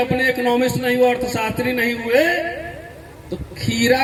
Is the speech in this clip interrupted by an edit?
no; 0 cuts

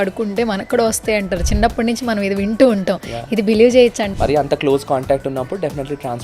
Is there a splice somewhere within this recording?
yes; 1 cut; at 4.1 s

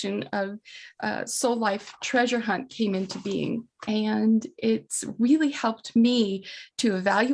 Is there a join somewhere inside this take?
yes; 1 cut; at 3.7 s

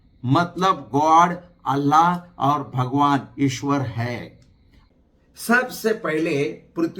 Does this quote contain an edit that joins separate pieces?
yes; 1 cut; at 4.8 s

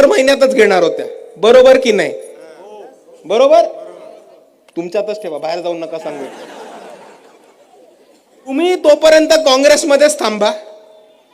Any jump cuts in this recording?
yes; 1 cut; at 8.5 s

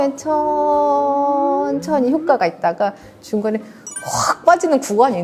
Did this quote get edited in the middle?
no; 0 cuts

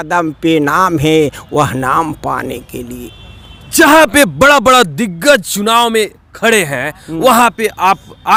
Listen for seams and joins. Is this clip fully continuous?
yes; 0 cuts

